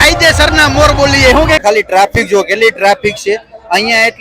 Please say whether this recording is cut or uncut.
cut